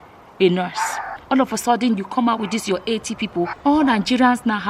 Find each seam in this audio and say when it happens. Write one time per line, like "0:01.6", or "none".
0:01.1
0:03.5